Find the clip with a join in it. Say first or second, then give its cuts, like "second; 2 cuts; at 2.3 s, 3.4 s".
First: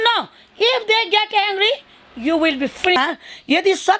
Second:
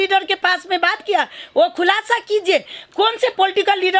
first; 1 cut; at 3.0 s